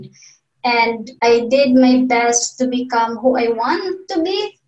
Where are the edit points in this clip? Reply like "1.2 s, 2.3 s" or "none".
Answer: 1.1 s

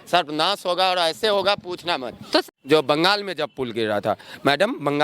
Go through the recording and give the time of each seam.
2.4 s

